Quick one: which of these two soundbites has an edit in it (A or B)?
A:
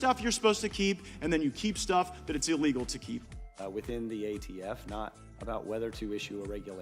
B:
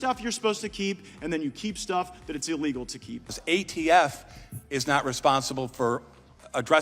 B